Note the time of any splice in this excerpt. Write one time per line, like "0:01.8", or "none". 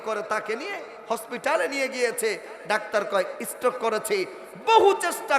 none